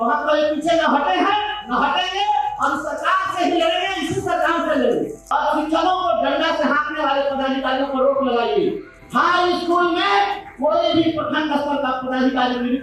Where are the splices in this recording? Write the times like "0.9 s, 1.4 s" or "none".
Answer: 5.2 s